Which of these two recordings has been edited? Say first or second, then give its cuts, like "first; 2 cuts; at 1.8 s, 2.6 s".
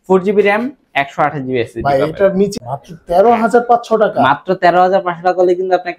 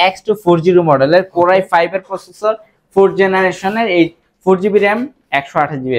first; 1 cut; at 2.6 s